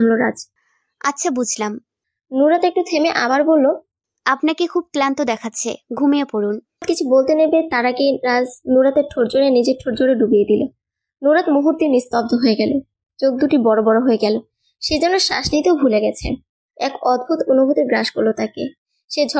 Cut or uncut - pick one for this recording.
cut